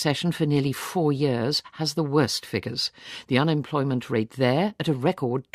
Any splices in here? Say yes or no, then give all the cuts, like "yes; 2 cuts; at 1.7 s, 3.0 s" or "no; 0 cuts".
yes; 1 cut; at 1.1 s